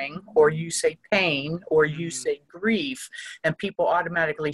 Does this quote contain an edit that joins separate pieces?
no; 0 cuts

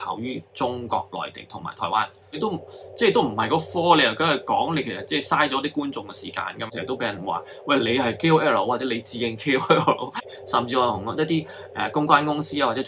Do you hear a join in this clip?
yes; 3 cuts; at 2.4 s, 6.7 s, 10.2 s

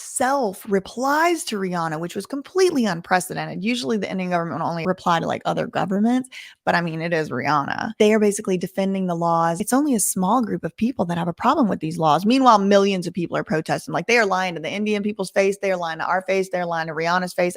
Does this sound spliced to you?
yes; 2 cuts; at 7.9 s, 9.6 s

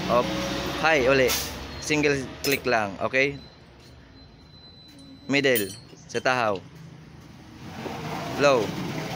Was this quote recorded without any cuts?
yes; 0 cuts

